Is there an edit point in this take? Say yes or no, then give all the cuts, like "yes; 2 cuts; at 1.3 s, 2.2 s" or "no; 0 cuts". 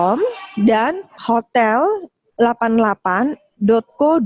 yes; 1 cut; at 1.1 s